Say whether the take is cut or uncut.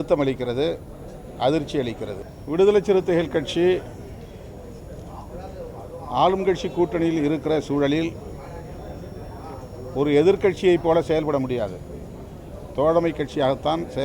cut